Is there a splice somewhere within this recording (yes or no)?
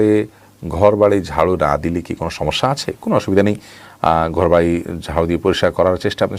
no